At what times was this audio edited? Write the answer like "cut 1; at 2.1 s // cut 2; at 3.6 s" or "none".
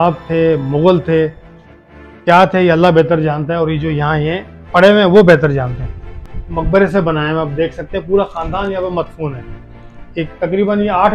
none